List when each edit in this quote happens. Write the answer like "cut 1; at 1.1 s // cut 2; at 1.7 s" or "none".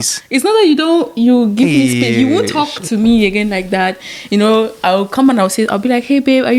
none